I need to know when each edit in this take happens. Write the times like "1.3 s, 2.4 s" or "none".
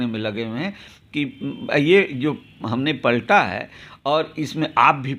none